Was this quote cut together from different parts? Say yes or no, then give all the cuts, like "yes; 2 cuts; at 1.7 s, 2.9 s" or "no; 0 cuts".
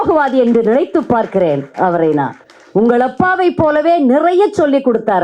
no; 0 cuts